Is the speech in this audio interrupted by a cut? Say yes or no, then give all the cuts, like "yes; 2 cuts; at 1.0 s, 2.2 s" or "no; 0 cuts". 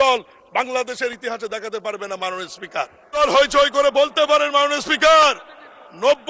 yes; 1 cut; at 3.2 s